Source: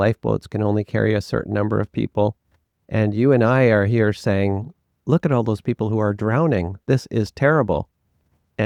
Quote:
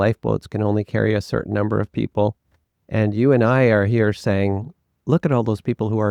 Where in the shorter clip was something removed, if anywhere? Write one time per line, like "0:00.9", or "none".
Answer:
none